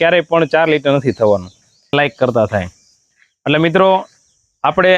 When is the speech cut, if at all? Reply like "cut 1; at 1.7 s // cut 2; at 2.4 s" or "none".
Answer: cut 1; at 1.9 s